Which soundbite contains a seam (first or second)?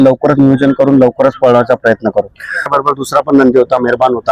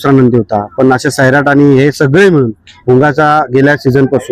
first